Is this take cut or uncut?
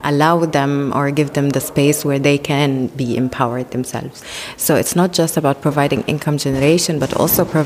uncut